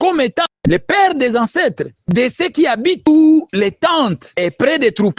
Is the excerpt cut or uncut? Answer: cut